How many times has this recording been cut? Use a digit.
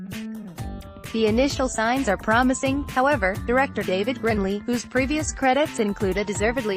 1